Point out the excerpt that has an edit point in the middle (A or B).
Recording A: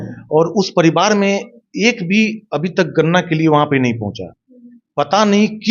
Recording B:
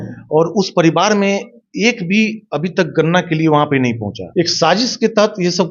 B